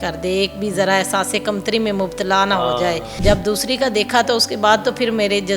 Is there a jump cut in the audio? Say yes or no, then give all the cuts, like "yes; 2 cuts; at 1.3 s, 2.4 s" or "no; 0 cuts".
yes; 1 cut; at 3.2 s